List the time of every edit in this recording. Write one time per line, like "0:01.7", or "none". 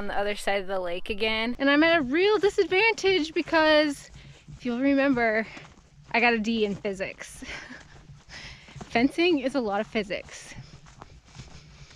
0:01.5